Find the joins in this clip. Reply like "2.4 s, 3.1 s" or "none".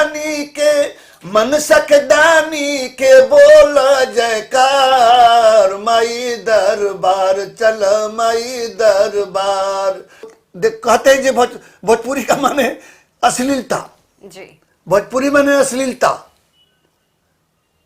10.4 s